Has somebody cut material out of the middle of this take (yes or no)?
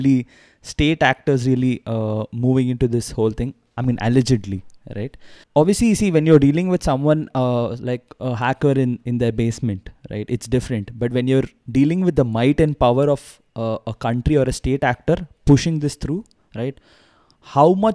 no